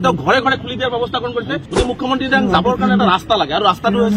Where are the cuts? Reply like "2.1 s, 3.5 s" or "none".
1.6 s